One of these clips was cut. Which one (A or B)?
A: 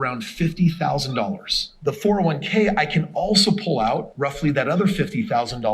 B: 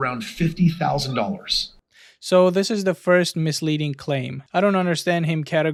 A